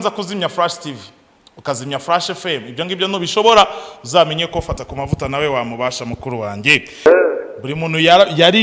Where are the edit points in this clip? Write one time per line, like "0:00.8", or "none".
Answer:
0:07.1

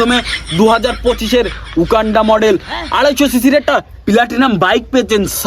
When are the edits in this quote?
none

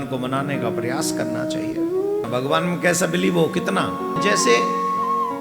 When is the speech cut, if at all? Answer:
0:02.3
0:04.2

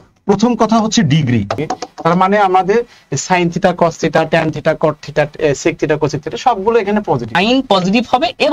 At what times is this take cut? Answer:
0:01.6
0:07.4

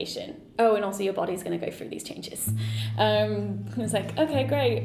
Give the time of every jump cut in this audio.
none

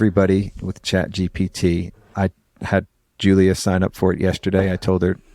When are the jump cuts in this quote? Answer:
0:02.0

